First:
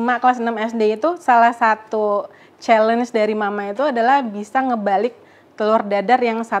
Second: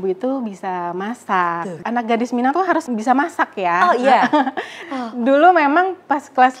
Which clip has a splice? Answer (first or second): second